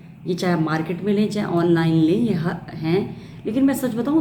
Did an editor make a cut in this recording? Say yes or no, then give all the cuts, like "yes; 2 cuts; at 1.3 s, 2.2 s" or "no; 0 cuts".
no; 0 cuts